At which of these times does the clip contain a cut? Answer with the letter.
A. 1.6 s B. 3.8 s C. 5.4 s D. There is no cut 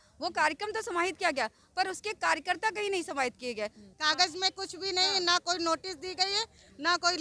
B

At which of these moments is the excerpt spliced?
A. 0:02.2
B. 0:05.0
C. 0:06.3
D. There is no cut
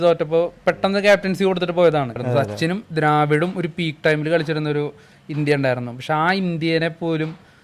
A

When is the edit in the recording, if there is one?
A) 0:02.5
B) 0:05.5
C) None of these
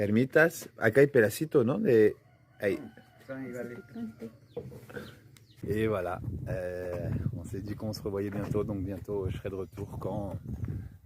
B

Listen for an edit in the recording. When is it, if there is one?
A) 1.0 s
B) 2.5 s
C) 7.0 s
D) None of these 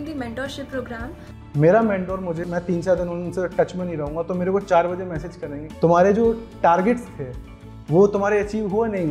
B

